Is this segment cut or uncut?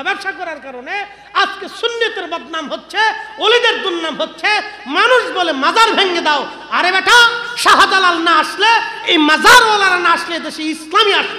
uncut